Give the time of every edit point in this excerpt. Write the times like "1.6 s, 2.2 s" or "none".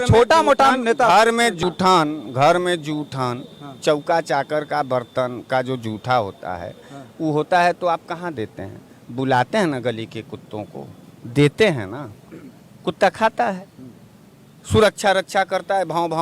1.6 s